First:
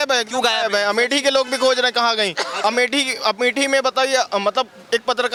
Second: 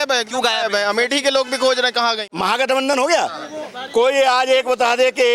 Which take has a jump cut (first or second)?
second